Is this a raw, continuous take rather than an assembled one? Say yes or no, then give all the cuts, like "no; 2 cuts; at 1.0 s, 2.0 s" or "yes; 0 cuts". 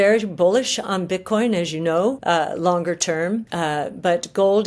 no; 2 cuts; at 2.2 s, 3.5 s